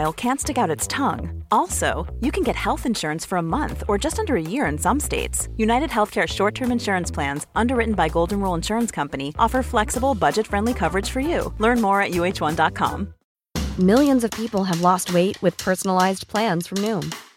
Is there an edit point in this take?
yes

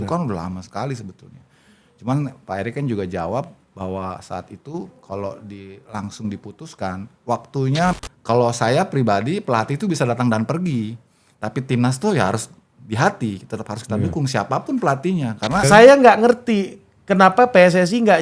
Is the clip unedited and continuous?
no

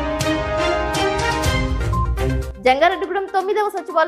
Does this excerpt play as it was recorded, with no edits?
no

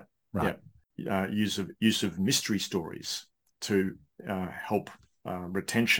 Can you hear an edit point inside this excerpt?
yes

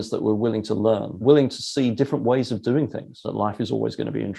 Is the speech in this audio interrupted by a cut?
yes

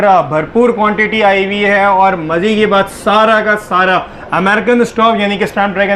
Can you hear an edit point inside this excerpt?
no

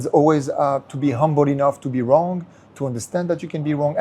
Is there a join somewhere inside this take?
no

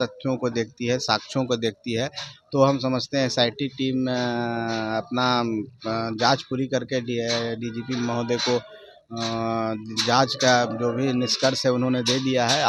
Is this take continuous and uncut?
yes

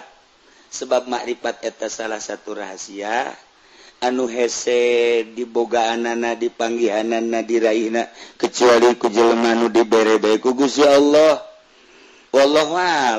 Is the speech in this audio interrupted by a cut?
no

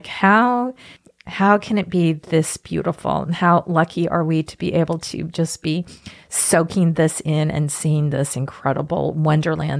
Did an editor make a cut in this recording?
no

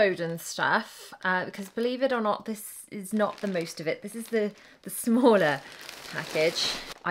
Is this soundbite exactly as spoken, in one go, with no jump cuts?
yes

